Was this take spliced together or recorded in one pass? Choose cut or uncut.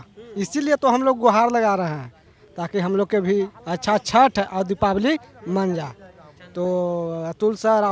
uncut